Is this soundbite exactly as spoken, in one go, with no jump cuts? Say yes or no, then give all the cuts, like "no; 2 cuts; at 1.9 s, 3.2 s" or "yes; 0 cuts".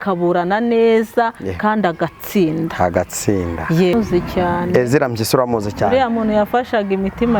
no; 1 cut; at 3.9 s